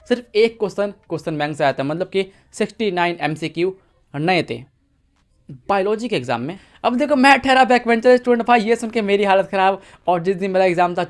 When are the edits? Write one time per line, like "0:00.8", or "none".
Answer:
none